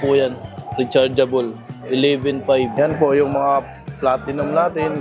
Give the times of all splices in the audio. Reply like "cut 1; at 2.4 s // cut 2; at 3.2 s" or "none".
cut 1; at 2.7 s